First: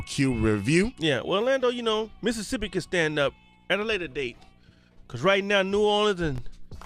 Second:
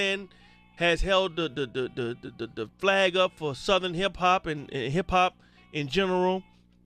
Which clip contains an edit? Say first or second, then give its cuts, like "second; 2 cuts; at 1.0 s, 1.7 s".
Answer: second; 1 cut; at 3.1 s